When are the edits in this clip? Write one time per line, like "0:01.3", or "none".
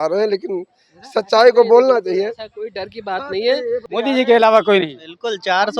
0:03.9

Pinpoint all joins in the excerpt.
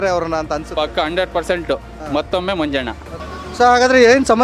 0:03.2

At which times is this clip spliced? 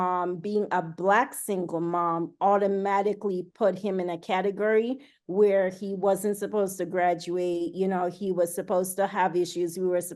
none

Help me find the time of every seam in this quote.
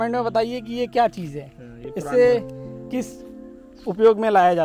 none

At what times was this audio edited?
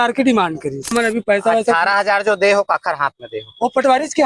0:00.9

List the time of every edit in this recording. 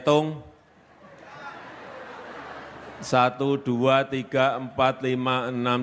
0:02.4

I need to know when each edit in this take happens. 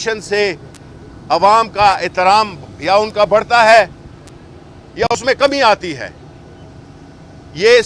none

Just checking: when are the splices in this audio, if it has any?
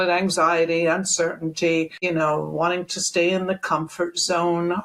0:02.0

